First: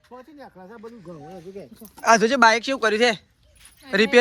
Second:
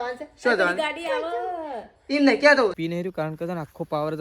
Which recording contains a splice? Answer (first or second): second